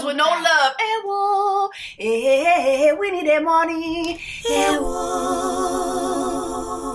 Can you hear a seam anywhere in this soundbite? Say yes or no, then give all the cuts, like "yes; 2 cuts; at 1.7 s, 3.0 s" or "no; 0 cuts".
no; 0 cuts